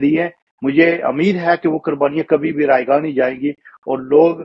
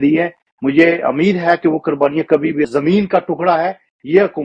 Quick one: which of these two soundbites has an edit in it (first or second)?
second